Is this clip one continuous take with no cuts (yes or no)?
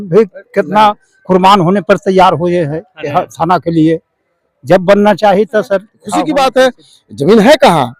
no